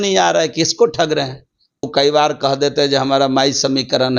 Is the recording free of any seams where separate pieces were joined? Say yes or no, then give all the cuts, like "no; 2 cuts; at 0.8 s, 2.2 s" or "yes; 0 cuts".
no; 1 cut; at 1.9 s